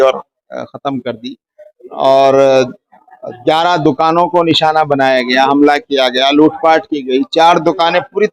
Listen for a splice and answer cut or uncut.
uncut